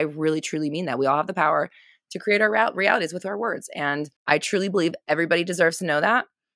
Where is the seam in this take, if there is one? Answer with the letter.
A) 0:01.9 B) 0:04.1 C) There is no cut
B